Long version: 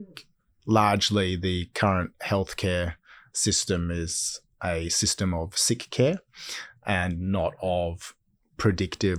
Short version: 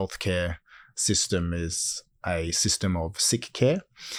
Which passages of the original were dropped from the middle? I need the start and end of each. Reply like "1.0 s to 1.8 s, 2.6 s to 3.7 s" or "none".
none